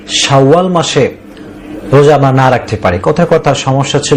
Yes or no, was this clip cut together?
no